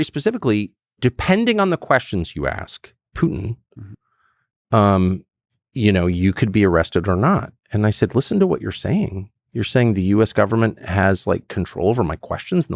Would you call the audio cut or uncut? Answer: cut